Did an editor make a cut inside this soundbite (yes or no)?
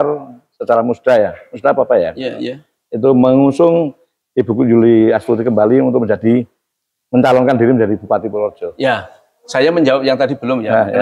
no